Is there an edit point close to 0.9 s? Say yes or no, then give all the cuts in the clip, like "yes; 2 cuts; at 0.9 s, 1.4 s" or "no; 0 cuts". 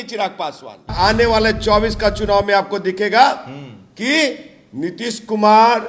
yes; 1 cut; at 0.9 s